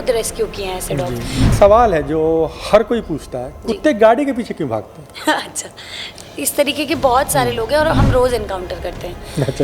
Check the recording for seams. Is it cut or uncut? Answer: cut